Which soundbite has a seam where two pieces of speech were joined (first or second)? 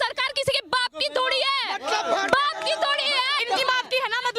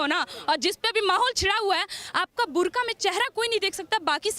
first